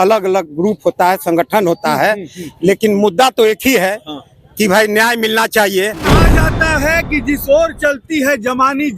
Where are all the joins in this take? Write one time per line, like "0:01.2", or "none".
0:06.1